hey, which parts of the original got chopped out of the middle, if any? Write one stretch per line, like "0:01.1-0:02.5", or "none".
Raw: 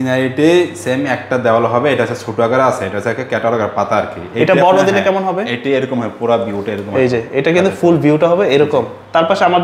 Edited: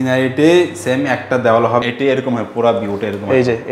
0:01.8-0:05.5